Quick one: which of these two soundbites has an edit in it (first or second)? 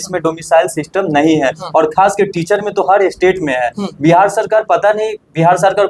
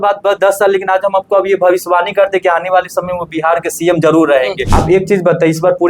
second